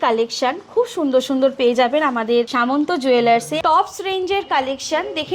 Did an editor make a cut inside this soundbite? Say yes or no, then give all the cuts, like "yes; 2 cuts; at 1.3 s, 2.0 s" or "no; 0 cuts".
yes; 2 cuts; at 2.5 s, 3.5 s